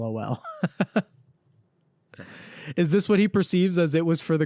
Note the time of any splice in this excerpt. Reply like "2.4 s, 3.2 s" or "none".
none